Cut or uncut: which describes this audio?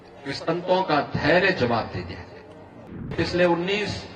cut